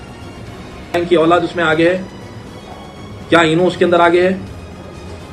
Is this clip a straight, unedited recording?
no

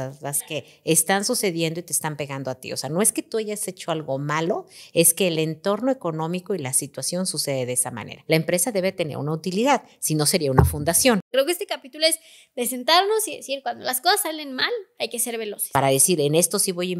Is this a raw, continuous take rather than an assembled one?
no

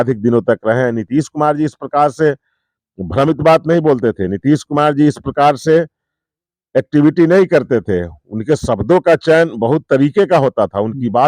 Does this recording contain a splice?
no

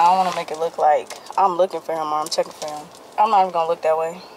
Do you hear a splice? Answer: no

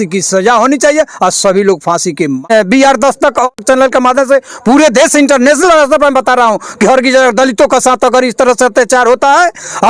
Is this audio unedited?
no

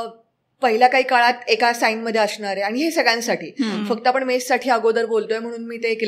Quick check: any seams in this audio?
no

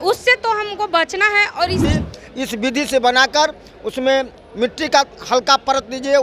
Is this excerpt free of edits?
no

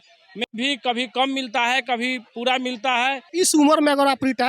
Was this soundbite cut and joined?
yes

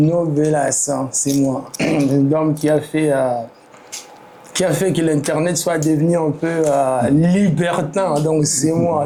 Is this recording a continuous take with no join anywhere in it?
yes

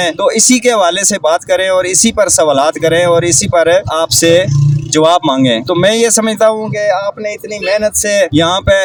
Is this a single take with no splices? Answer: yes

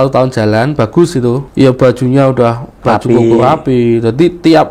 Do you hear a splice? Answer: yes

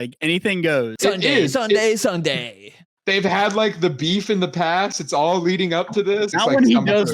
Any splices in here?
yes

